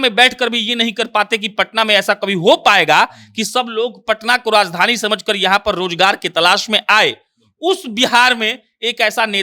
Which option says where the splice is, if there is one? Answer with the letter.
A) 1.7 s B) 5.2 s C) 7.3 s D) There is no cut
D